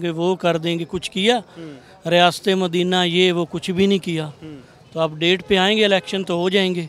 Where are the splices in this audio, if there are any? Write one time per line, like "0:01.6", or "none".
none